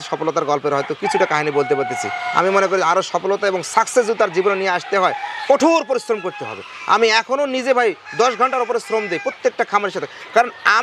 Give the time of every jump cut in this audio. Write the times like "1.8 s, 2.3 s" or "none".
none